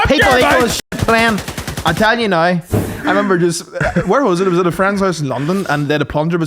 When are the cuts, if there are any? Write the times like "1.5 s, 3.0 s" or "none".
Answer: 2.7 s